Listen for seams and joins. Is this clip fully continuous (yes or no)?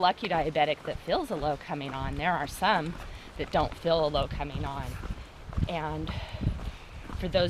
yes